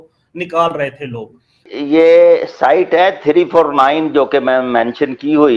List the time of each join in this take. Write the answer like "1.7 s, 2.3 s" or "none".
1.6 s